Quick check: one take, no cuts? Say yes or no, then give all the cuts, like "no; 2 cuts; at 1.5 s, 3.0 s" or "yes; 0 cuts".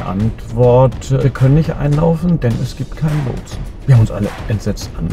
no; 1 cut; at 1.2 s